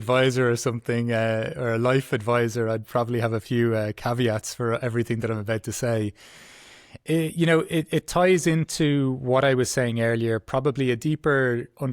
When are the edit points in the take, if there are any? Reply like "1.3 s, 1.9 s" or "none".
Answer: none